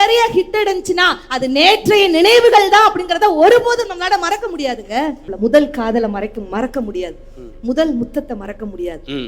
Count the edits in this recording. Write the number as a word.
one